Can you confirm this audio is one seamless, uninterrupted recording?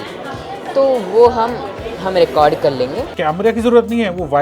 no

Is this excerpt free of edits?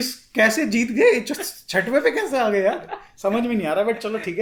yes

